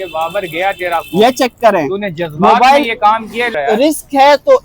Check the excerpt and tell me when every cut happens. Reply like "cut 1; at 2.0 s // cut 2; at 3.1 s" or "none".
cut 1; at 3.5 s